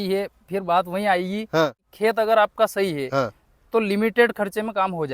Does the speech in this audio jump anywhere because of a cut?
yes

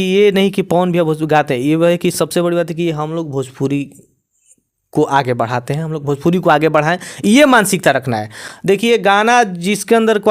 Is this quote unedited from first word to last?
yes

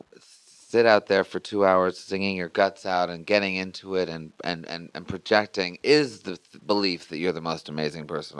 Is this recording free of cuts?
no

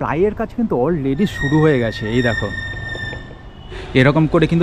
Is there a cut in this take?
no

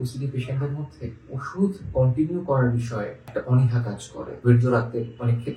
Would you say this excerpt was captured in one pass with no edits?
no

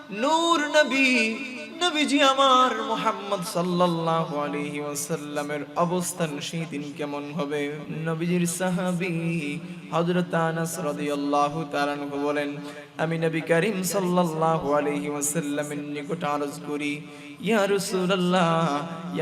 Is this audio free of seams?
no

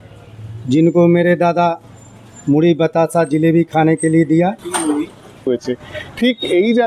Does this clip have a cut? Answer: yes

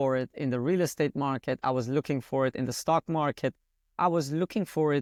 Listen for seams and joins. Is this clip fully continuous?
yes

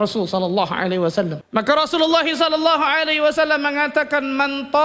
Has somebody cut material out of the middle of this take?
yes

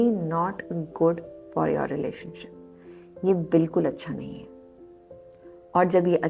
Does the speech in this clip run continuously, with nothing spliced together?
yes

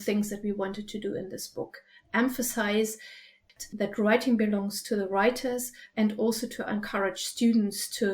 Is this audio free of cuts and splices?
no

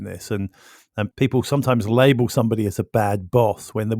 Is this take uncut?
no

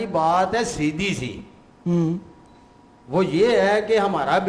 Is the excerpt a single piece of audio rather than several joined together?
yes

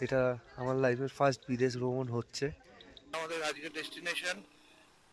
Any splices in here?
yes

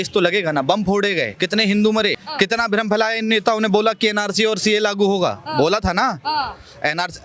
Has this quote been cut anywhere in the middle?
yes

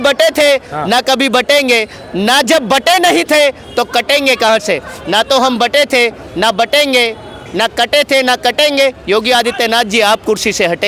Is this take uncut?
yes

